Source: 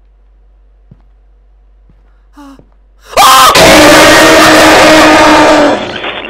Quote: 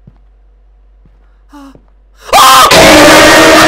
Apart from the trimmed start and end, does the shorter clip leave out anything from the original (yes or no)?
no